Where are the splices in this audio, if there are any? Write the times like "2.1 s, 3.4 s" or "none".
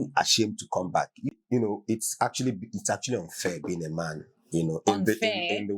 1.3 s